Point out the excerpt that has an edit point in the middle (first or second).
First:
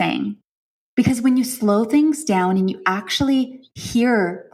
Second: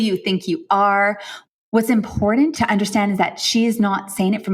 second